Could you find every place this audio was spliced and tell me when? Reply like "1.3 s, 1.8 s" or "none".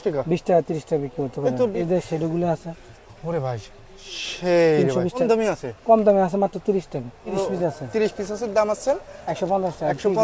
1.8 s, 5.2 s, 7.3 s